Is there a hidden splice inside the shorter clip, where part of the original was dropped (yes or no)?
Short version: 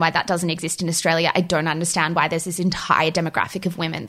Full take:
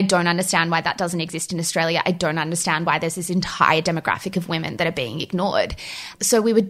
no